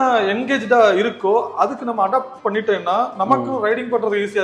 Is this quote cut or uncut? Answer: uncut